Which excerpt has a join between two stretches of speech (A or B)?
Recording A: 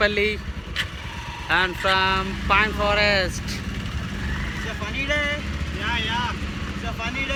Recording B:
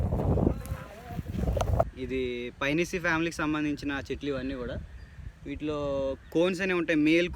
B